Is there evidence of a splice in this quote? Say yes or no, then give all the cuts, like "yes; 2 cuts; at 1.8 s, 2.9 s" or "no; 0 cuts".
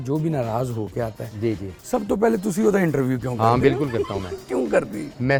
no; 0 cuts